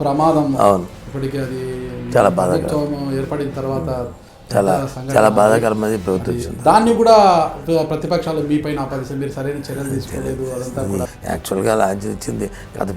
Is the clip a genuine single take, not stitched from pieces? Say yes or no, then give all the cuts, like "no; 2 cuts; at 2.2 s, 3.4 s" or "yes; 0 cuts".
no; 1 cut; at 11.1 s